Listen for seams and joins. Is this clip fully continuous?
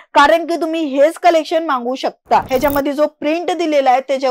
no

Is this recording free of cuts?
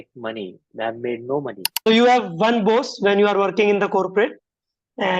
no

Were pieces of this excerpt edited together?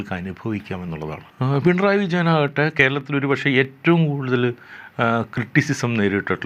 yes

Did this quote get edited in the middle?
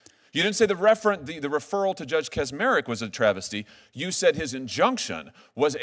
no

